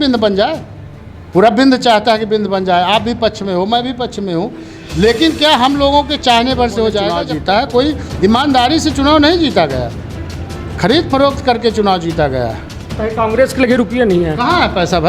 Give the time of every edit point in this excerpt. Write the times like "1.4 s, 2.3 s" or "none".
7.2 s